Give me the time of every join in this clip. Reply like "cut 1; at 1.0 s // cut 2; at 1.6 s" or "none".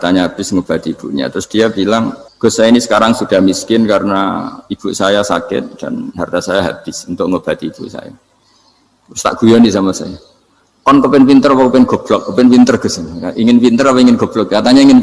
cut 1; at 2.2 s